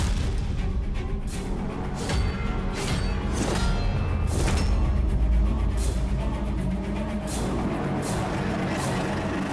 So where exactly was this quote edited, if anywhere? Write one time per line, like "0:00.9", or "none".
none